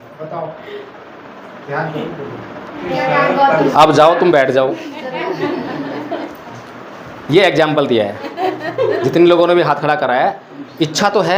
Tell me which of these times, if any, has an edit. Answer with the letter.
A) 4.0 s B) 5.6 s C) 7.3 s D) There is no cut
D